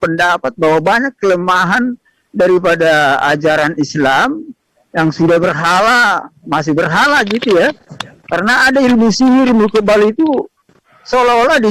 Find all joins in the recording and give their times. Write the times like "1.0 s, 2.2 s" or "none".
none